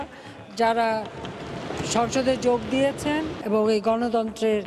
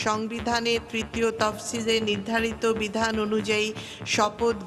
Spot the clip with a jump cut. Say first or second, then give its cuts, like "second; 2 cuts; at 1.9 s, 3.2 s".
first; 1 cut; at 3.4 s